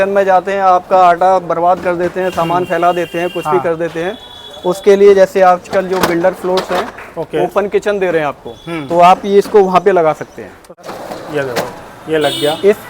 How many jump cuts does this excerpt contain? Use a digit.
1